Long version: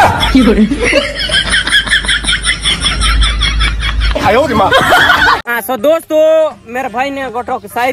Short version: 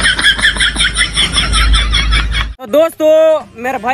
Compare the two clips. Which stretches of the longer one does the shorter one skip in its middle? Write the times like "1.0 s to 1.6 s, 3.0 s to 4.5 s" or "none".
4.0 s to 5.6 s